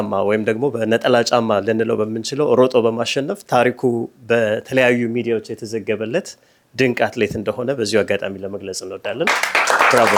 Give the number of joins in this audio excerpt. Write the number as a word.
zero